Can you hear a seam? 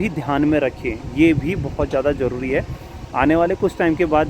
no; 0 cuts

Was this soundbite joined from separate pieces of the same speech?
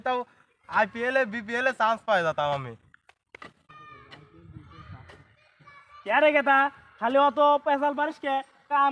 no; 0 cuts

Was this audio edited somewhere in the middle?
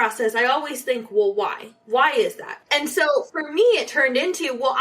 yes; 1 cut; at 2.5 s

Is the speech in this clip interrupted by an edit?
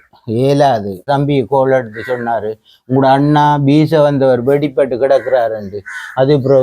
yes; 1 cut; at 1.0 s

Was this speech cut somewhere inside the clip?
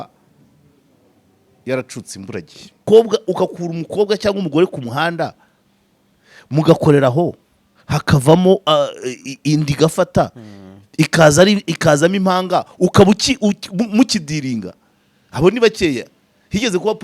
yes; 1 cut; at 2.8 s

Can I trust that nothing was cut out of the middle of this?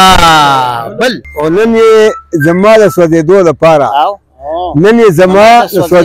no; 1 cut; at 1.2 s

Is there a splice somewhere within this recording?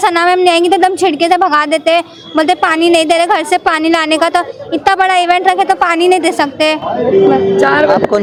no; 0 cuts

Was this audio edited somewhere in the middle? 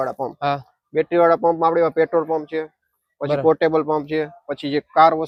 no; 0 cuts

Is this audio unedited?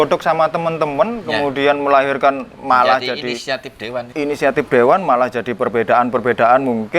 no; 1 cut; at 4.1 s

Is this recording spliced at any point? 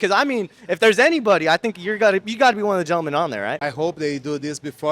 yes; 1 cut; at 3.6 s

